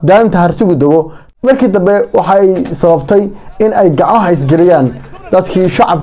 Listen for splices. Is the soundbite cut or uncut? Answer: cut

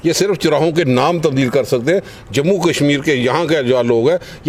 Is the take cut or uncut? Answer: uncut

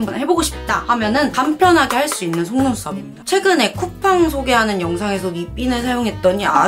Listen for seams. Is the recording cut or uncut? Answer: cut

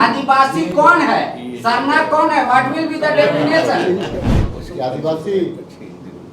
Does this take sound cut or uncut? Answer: cut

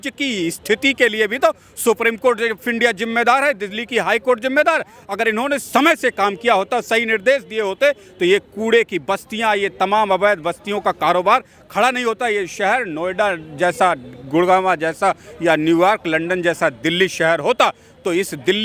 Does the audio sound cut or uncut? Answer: uncut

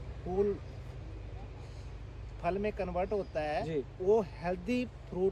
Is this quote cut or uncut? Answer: uncut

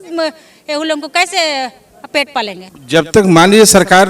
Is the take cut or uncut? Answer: cut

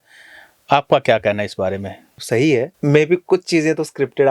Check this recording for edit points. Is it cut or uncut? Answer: cut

